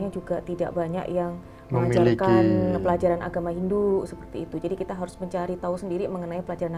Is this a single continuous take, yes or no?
yes